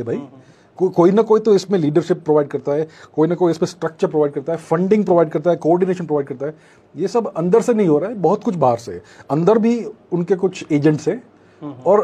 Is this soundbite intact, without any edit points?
yes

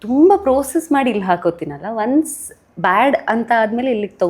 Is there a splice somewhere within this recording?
no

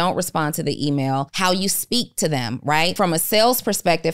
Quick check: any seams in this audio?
yes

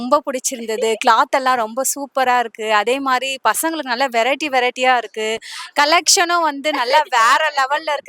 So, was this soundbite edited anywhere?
no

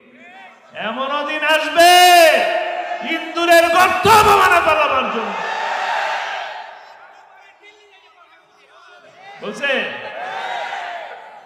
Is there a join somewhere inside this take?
no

